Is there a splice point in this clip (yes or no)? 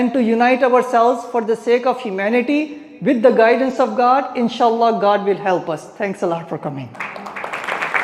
no